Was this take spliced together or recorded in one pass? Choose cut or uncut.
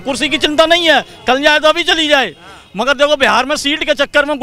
uncut